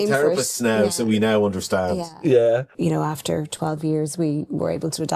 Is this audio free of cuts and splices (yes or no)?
no